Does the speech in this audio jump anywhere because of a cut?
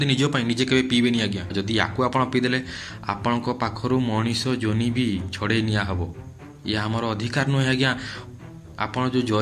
yes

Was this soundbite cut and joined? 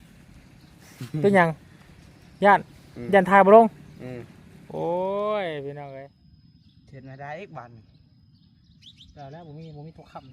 yes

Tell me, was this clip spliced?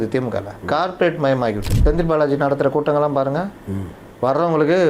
yes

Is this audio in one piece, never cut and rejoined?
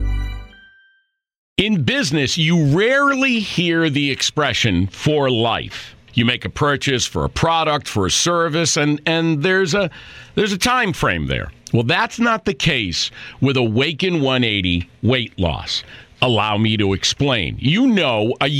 no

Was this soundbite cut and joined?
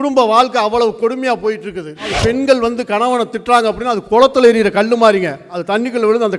yes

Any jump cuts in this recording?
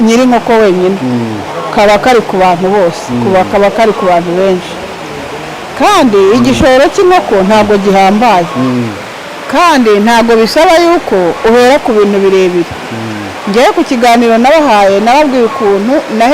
no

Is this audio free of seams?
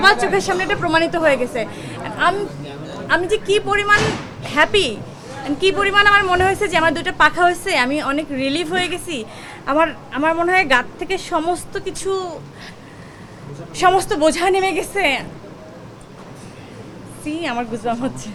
yes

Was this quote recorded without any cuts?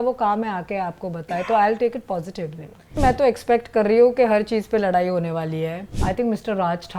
no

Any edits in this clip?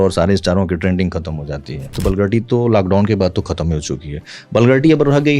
yes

